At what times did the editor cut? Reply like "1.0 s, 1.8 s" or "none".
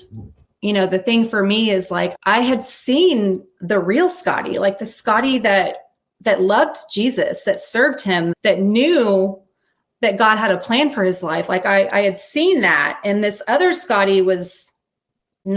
none